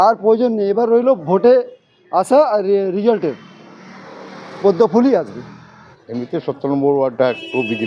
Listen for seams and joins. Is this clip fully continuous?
no; 1 cut; at 5.7 s

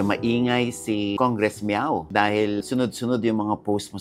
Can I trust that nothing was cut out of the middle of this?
no; 2 cuts; at 1.1 s, 2.6 s

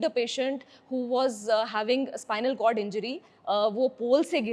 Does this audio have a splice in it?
no; 0 cuts

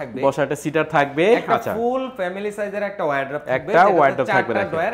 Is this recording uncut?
yes; 0 cuts

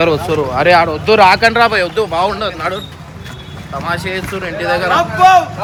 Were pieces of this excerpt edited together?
no; 0 cuts

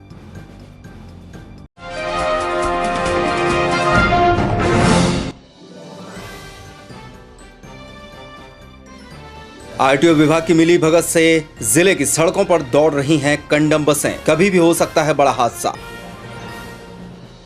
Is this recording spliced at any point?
yes; 1 cut; at 9.7 s

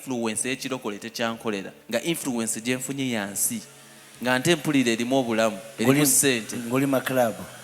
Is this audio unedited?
no; 1 cut; at 1.7 s

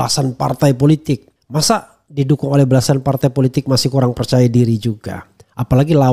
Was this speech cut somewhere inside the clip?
no; 0 cuts

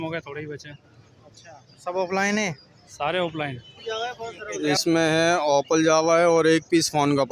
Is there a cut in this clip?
yes; 1 cut; at 3.7 s

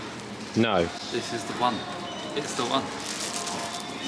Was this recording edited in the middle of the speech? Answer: no; 0 cuts

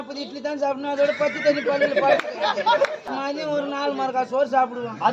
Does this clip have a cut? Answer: yes; 1 cut; at 3.0 s

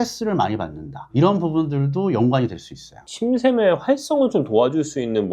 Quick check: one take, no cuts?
no; 1 cut; at 3.0 s

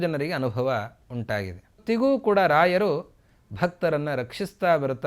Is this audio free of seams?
no; 1 cut; at 1.8 s

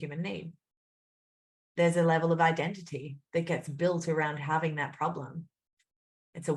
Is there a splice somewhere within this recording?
no; 0 cuts

